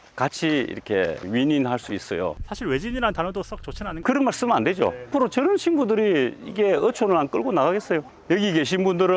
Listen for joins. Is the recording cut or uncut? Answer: cut